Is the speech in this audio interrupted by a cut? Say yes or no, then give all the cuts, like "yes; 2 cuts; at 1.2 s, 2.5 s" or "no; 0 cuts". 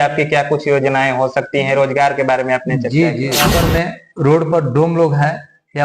yes; 1 cut; at 3.5 s